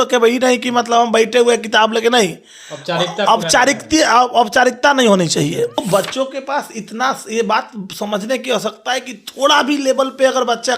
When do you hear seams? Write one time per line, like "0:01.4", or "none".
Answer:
0:05.8